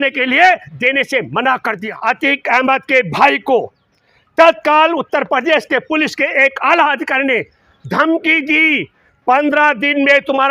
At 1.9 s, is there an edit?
yes; 1 cut; at 1.9 s

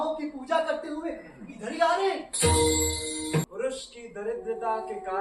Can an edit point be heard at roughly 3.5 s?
yes; 1 cut; at 3.5 s

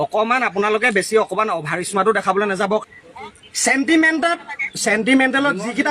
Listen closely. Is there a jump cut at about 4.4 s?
no; 1 cut; at 2.8 s

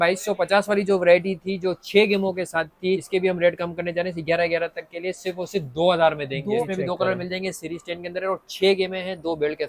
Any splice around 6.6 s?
yes; 2 cuts; at 3.0 s, 6.6 s

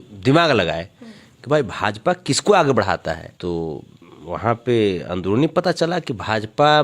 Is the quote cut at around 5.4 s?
no; 1 cut; at 3.3 s

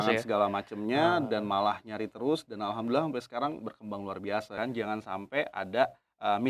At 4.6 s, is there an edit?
yes; 1 cut; at 4.6 s

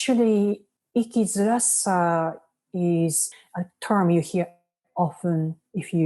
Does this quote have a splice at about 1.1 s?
no; 1 cut; at 3.4 s

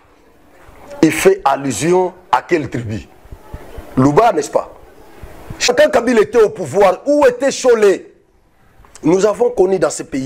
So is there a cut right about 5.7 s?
yes; 1 cut; at 5.7 s

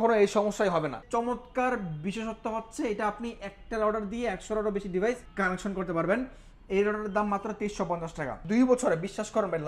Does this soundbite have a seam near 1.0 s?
yes; 3 cuts; at 1.0 s, 5.3 s, 8.4 s

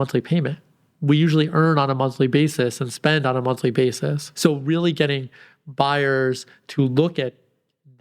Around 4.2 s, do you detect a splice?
yes; 1 cut; at 4.2 s

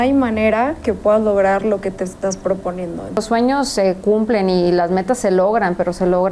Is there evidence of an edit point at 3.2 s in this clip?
yes; 1 cut; at 3.2 s

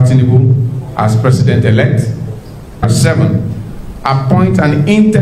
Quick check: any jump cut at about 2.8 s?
yes; 1 cut; at 2.8 s

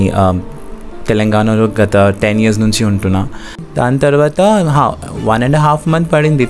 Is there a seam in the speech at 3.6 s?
yes; 1 cut; at 3.6 s

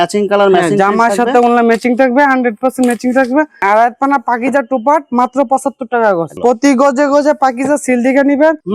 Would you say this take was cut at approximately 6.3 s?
yes; 2 cuts; at 3.6 s, 6.3 s

